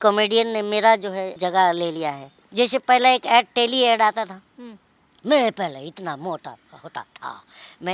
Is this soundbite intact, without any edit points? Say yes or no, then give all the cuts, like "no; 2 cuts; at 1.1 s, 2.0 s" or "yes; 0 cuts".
no; 2 cuts; at 1.3 s, 2.4 s